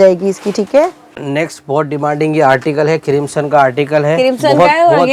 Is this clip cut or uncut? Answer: uncut